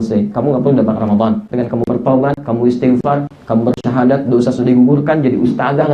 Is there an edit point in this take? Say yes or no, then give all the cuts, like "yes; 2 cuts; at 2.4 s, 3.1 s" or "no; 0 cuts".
yes; 1 cut; at 1.5 s